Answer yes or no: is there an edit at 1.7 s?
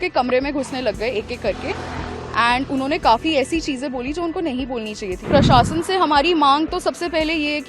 no